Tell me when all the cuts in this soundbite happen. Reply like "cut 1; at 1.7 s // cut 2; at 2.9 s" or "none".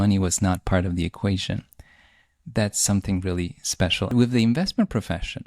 cut 1; at 4.1 s